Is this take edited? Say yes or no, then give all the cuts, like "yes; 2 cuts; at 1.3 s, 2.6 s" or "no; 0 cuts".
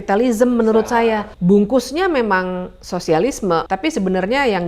yes; 2 cuts; at 1.3 s, 3.7 s